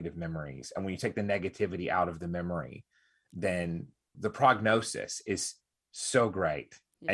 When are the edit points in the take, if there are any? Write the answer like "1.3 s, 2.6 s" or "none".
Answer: 4.0 s